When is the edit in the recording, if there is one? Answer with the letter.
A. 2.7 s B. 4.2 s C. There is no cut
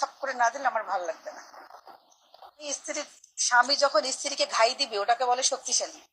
A